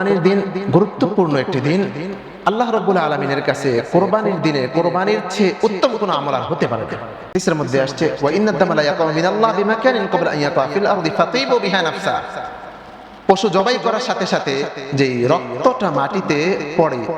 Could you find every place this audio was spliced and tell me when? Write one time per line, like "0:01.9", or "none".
0:07.4